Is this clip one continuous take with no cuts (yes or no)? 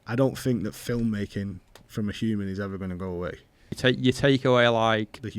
no